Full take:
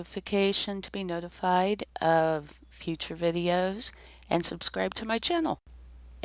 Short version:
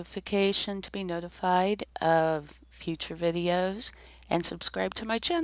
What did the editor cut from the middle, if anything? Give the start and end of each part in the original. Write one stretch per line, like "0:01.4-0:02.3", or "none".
none